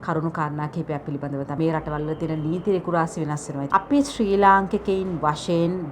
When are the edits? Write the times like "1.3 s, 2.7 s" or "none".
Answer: 1.5 s, 3.6 s